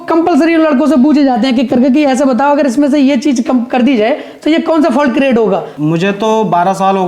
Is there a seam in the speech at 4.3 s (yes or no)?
no